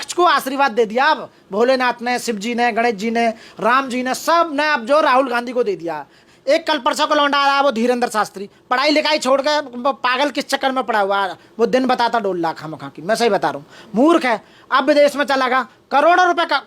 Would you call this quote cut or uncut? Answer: cut